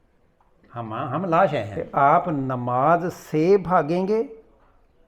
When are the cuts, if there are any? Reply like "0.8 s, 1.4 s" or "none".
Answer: 1.8 s